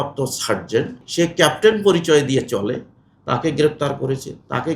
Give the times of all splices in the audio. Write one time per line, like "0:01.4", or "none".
0:01.0

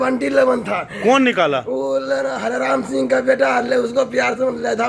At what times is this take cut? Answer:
none

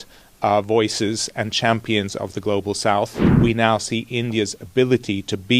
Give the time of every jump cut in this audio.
0:03.2

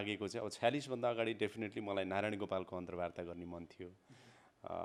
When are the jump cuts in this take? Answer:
none

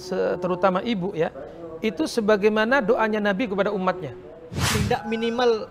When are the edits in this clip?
0:04.7

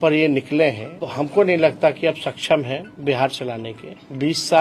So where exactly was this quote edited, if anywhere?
0:01.1

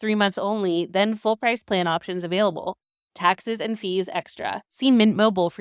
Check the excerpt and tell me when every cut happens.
0:04.7

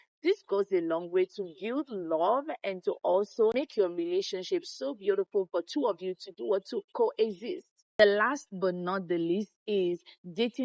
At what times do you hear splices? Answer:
none

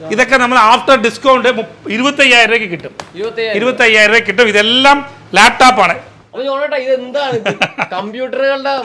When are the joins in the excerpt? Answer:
none

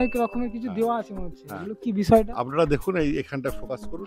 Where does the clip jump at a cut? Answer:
none

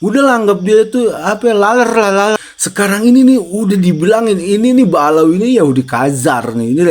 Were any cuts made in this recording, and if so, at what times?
0:02.4

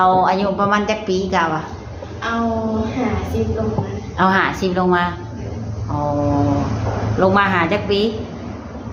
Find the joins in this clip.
none

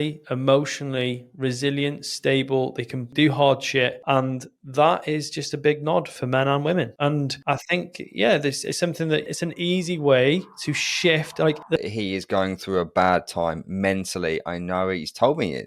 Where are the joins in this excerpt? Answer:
0:11.9

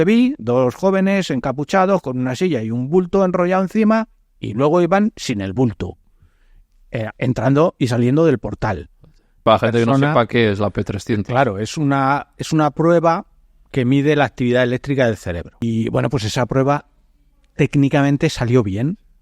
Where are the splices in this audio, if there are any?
0:09.3
0:15.6

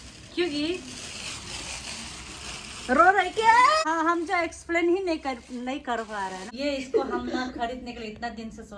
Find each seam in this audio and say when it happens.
0:03.8
0:06.5

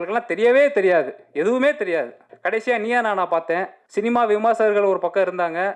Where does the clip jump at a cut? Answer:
0:02.2
0:03.8

